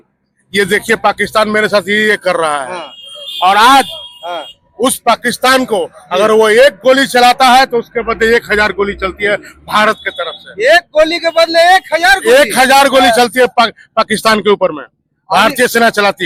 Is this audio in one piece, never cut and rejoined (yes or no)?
yes